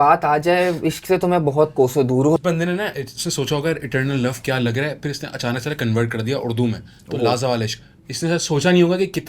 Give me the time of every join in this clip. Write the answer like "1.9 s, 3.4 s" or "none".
2.4 s